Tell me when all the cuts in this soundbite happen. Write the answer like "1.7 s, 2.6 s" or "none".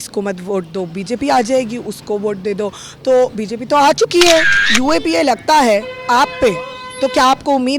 4.6 s